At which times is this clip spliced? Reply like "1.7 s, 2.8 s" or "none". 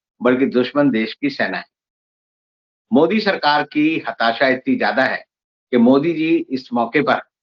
none